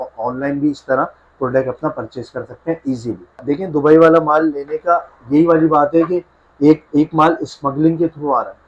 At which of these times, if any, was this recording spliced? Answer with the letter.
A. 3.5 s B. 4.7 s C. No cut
A